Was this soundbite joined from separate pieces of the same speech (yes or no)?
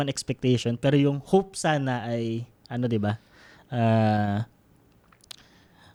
no